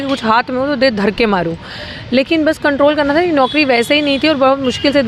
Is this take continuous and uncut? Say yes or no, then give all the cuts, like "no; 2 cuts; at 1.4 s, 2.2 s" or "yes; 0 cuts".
yes; 0 cuts